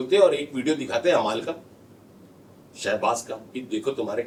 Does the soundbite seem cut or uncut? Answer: uncut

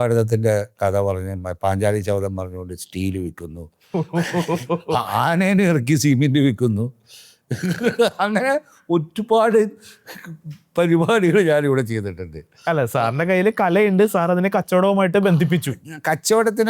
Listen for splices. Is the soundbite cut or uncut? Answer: uncut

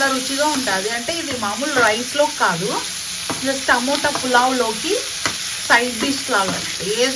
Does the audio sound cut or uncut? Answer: uncut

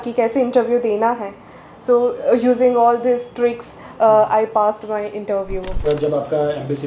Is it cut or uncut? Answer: cut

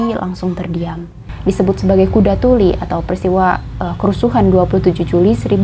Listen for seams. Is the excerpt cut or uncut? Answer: cut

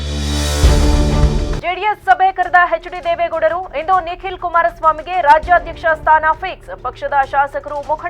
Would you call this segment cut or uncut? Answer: cut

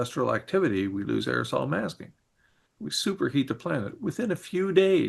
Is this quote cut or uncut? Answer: cut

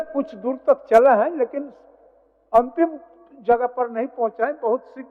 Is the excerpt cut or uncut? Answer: uncut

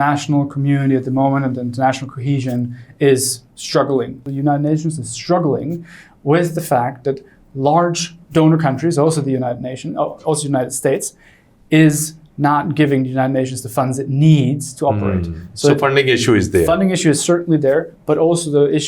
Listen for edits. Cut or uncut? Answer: cut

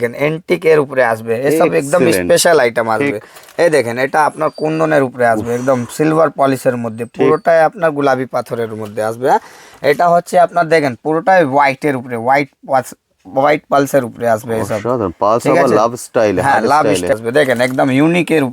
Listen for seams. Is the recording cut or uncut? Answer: cut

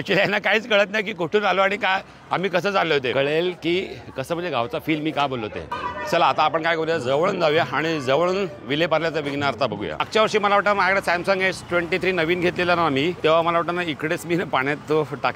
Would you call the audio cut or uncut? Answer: cut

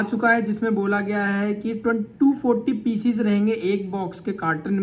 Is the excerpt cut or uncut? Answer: uncut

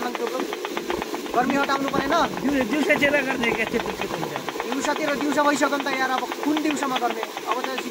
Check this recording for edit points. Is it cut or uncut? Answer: uncut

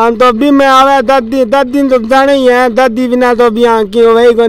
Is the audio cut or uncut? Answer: uncut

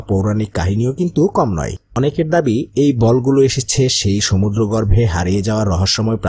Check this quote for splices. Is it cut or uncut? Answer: cut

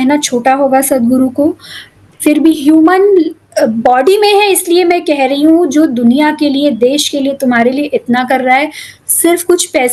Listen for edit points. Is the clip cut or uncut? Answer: uncut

